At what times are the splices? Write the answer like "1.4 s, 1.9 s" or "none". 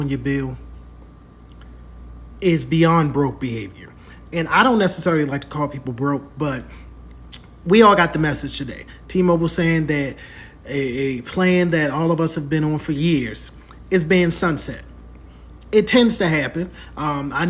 none